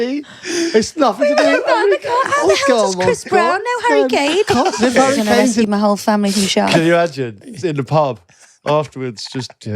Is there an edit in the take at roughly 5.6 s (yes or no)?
yes